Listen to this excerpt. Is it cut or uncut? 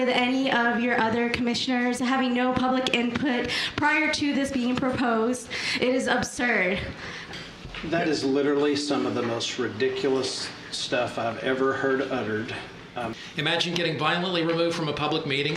cut